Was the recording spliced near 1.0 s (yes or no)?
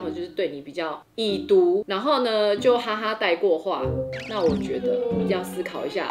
no